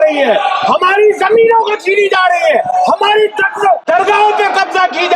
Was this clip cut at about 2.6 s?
no; 1 cut; at 3.8 s

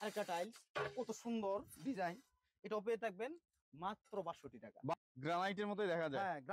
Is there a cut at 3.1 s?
no; 1 cut; at 4.9 s

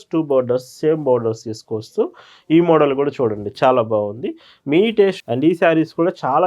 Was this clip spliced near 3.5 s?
no; 1 cut; at 5.2 s

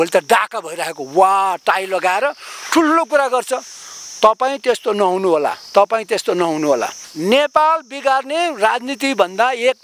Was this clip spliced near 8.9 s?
no; 1 cut; at 7.0 s

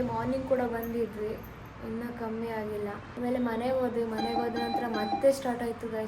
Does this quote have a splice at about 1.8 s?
no; 1 cut; at 3.1 s

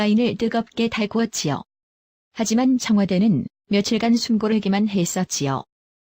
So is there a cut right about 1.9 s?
yes; 1 cut; at 1.9 s

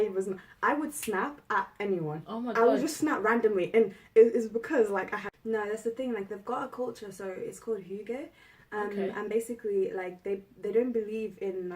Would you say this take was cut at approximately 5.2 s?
yes; 1 cut; at 5.2 s

